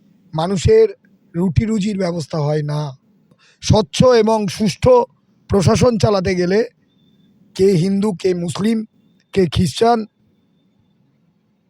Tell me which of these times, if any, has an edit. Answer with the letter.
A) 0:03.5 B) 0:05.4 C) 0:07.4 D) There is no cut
A